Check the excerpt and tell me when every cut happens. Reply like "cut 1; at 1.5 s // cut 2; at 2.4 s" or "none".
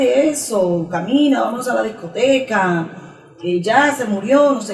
none